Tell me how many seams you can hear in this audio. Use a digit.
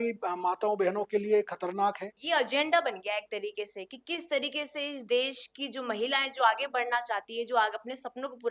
1